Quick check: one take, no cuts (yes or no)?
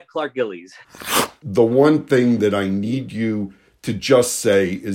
no